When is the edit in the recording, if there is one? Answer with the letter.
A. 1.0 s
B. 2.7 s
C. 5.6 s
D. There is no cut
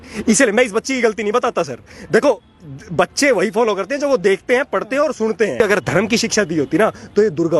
C